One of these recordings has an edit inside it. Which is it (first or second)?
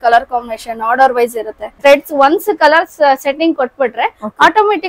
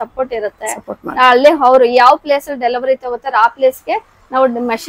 first